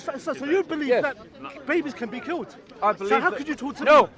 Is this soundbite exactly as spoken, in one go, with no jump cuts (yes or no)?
yes